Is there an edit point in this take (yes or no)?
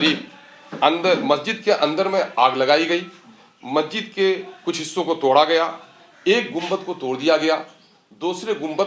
no